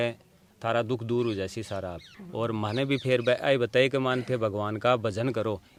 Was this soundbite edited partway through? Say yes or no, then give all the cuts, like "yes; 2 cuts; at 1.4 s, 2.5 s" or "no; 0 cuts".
no; 0 cuts